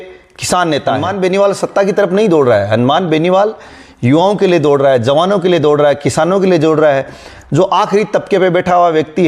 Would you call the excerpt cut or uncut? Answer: cut